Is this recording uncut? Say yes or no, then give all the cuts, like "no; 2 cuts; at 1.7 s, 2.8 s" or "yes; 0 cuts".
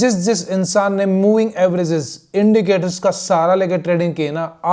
yes; 0 cuts